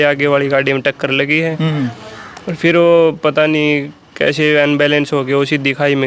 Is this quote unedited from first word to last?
yes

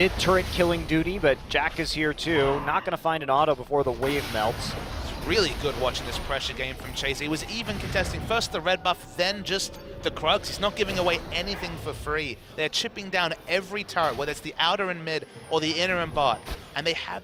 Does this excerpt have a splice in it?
no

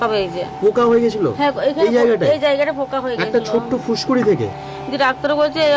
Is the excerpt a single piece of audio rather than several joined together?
no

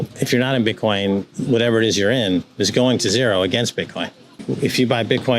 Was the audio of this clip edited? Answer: yes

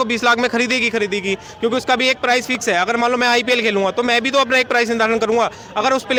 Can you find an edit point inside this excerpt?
no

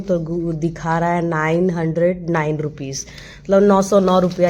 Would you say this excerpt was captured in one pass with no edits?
yes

